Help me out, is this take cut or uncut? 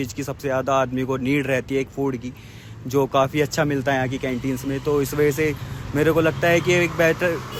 uncut